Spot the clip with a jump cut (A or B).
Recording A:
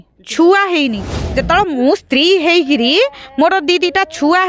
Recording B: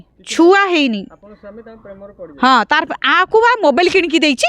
A